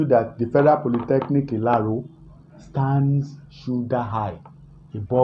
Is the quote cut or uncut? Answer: uncut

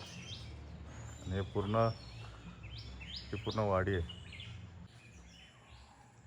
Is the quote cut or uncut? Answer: cut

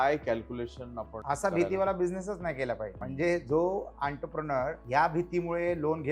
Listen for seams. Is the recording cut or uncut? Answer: cut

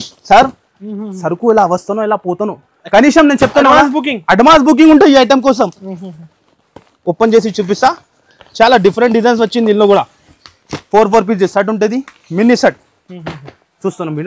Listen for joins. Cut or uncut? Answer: uncut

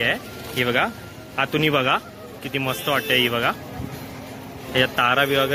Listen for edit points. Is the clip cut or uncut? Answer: uncut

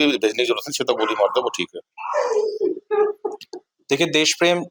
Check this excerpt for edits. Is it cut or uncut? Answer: uncut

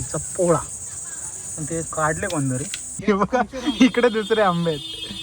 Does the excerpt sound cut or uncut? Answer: cut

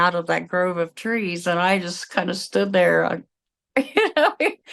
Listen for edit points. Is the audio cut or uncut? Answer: uncut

